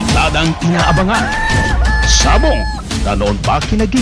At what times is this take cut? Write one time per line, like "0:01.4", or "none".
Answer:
none